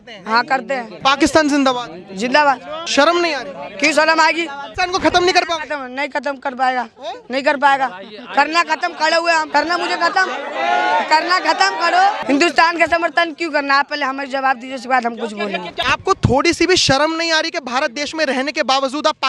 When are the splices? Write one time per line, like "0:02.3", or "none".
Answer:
0:00.9
0:02.7
0:04.6
0:09.5
0:12.2
0:15.8